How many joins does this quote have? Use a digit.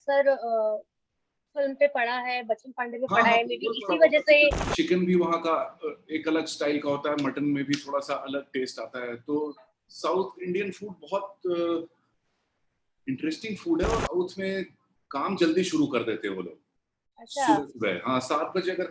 2